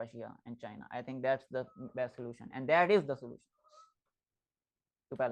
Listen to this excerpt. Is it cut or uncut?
uncut